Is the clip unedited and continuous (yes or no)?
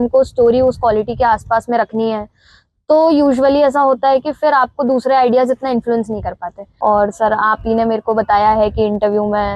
no